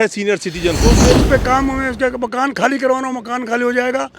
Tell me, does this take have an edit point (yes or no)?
yes